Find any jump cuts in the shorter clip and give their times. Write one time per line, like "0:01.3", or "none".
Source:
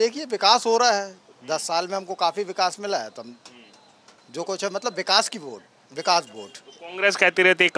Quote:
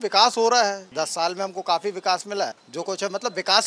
0:00.8
0:02.6